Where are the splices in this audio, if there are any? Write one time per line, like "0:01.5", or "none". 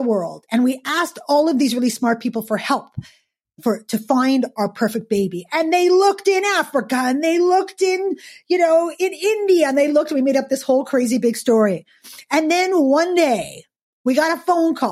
none